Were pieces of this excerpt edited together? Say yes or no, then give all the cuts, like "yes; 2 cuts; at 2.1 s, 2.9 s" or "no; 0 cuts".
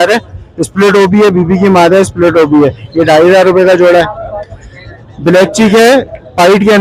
no; 0 cuts